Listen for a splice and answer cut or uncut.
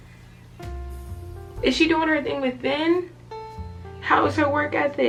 uncut